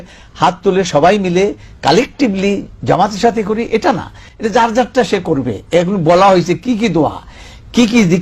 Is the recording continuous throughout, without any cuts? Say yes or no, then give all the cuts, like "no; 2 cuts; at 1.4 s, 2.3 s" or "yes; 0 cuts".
yes; 0 cuts